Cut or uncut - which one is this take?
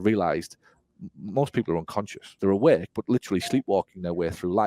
cut